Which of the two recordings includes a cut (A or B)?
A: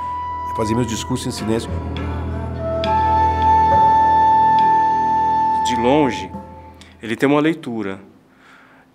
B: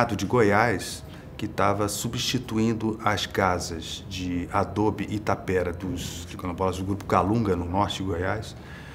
B